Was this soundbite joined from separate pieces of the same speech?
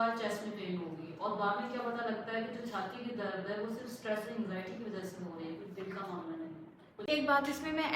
yes; 1 cut; at 7.0 s

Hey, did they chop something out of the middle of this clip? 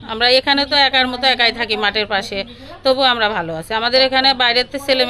no; 0 cuts

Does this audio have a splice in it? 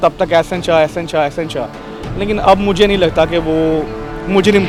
no; 0 cuts

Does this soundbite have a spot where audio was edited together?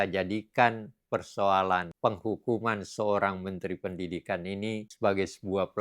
yes; 2 cuts; at 1.9 s, 4.9 s

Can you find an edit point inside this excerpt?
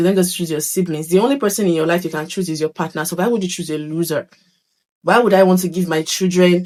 no; 0 cuts

